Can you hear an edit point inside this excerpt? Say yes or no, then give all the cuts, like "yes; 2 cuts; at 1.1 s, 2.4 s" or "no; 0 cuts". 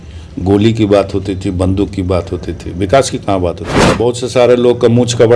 yes; 1 cut; at 3.8 s